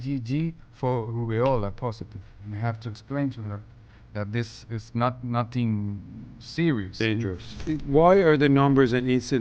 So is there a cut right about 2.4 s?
yes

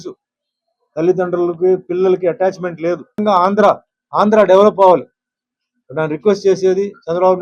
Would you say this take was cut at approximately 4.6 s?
no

